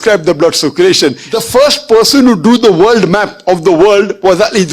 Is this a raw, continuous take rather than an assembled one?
no; 1 cut; at 1.2 s

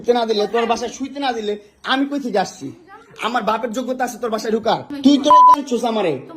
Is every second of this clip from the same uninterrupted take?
no; 1 cut; at 4.9 s

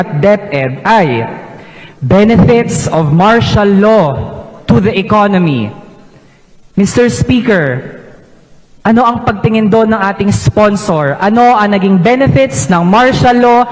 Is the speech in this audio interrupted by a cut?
no; 0 cuts

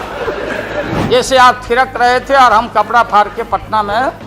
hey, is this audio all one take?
no; 1 cut; at 0.9 s

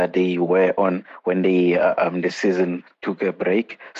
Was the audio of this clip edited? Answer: no; 0 cuts

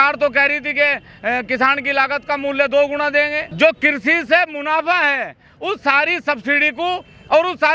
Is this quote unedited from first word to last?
no; 1 cut; at 3.4 s

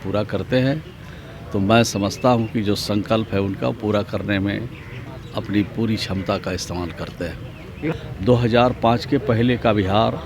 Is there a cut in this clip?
yes; 1 cut; at 7.9 s

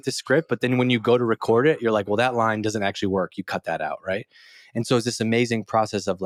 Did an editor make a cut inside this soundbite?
no; 0 cuts

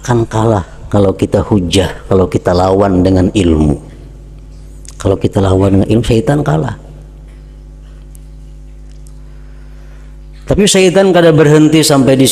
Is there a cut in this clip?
no; 0 cuts

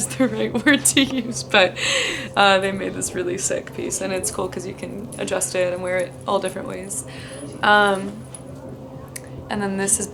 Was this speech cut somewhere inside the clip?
no; 0 cuts

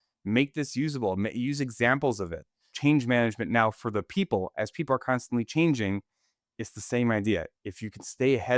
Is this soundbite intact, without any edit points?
yes; 0 cuts

